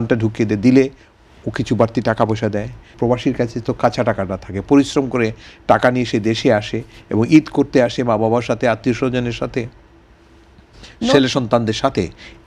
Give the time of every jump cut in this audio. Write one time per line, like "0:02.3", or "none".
0:02.9